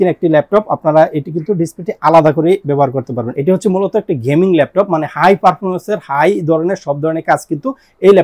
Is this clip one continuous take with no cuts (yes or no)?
no